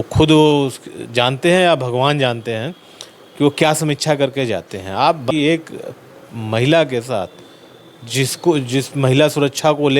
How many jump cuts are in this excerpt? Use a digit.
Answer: 1